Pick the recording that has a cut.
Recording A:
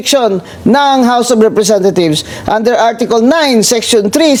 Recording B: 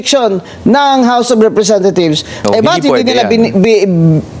B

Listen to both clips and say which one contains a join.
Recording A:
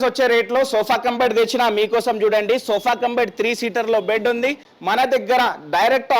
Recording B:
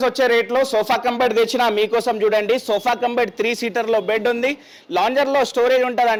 A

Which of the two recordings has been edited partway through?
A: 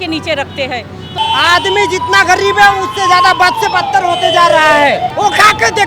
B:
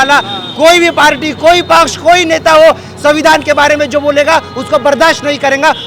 A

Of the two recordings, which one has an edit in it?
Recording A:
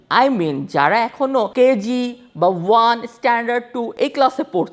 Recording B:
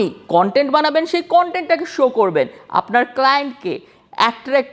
A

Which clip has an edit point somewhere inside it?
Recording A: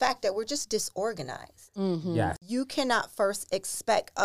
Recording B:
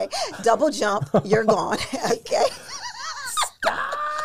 A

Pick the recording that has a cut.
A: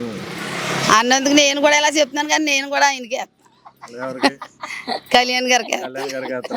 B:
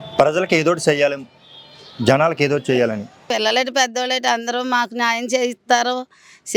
B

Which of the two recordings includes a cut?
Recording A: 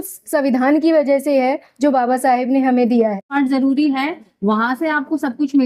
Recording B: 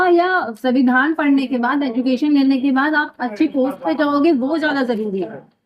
A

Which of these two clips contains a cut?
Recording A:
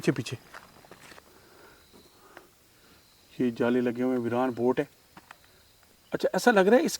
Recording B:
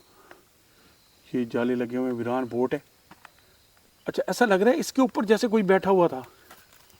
A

